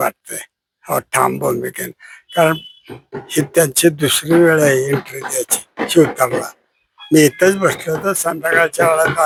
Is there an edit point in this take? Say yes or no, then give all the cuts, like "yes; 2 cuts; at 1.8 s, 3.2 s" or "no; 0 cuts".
no; 0 cuts